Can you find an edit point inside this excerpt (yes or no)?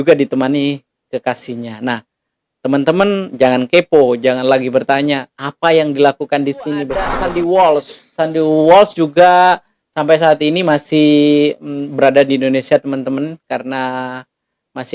yes